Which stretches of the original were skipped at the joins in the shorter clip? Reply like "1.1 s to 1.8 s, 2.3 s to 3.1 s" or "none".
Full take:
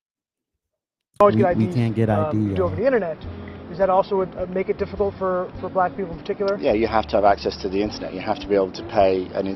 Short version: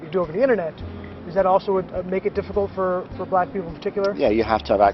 none